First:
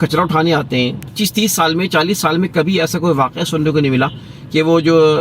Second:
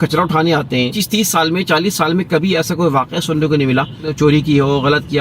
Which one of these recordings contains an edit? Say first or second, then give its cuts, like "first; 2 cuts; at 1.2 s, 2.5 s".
second; 2 cuts; at 1.0 s, 4.1 s